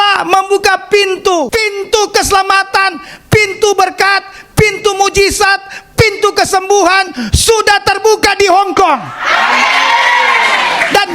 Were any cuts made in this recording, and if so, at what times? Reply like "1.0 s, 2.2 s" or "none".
1.5 s